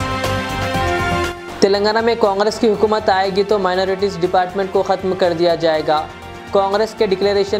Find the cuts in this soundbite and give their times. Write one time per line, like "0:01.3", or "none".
0:01.0